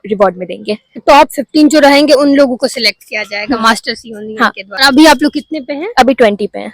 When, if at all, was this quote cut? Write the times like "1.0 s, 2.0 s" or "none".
1.0 s, 4.8 s